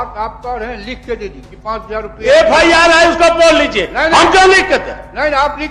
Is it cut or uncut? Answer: cut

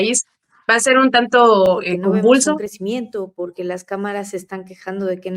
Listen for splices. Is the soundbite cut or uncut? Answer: cut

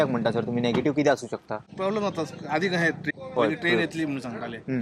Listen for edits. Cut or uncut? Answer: cut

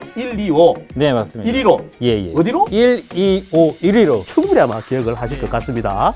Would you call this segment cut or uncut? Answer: uncut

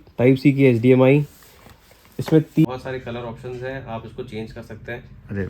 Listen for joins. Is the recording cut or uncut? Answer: cut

